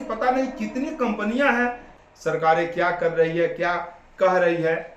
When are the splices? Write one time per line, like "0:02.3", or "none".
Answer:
0:01.9